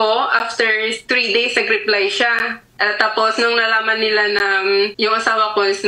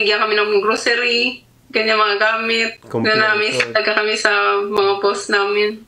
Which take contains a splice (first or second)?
first